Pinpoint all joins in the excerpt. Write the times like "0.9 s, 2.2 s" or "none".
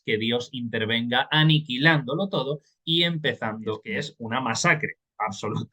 4.2 s